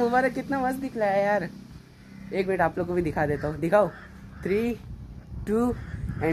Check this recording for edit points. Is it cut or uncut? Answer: uncut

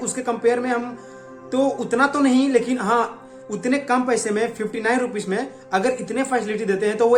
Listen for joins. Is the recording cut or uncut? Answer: uncut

